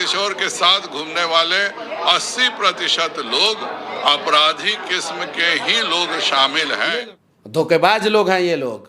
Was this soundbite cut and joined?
yes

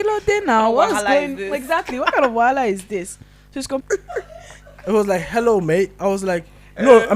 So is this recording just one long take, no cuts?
no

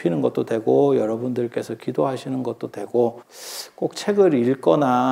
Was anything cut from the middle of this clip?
yes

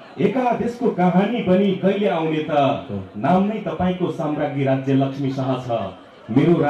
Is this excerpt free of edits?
yes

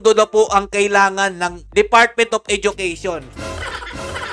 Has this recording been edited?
no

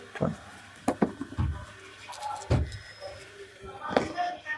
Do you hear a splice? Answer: no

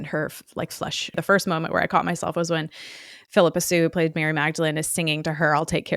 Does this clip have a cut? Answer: yes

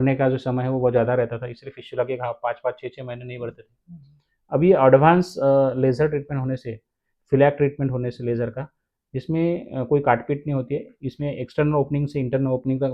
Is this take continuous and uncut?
yes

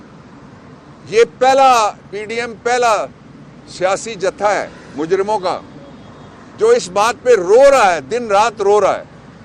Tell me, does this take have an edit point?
no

